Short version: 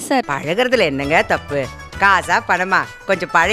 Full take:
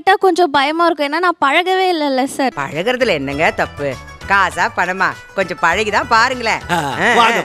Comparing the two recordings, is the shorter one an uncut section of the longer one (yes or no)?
yes